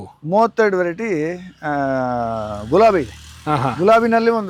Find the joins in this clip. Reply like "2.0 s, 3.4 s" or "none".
none